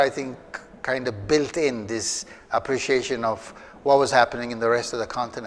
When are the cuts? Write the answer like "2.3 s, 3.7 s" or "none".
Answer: none